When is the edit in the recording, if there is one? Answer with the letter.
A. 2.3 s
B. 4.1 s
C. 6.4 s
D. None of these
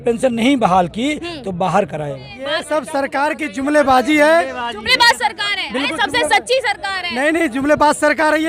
A